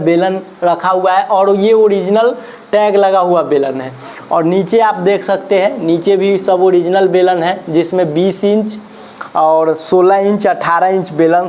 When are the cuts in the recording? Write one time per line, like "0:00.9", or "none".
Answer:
none